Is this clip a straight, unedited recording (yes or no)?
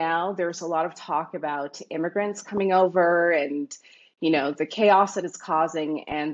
yes